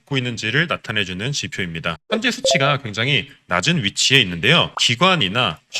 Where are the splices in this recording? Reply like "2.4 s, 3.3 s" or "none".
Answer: 4.7 s